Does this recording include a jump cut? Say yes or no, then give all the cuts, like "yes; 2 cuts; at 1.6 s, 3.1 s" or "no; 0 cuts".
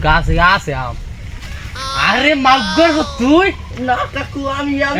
no; 0 cuts